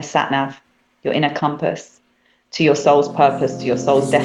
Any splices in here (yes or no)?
no